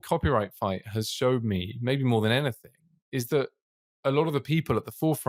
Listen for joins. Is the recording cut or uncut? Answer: uncut